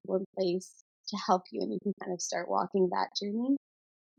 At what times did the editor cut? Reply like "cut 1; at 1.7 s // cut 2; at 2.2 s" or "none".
none